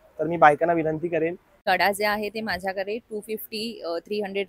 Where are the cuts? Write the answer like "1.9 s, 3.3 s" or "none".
1.5 s